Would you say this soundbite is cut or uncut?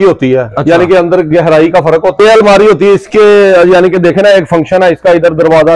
cut